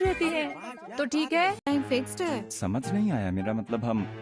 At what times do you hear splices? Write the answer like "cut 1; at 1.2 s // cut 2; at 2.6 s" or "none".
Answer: none